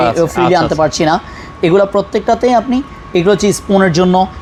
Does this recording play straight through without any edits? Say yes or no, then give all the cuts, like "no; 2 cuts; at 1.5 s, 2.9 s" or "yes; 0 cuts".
yes; 0 cuts